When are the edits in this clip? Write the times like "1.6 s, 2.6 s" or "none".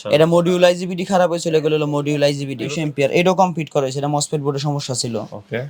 2.7 s